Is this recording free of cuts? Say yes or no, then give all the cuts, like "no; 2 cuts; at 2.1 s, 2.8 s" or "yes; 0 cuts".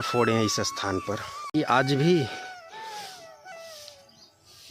no; 1 cut; at 1.5 s